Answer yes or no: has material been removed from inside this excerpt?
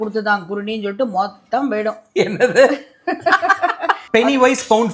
yes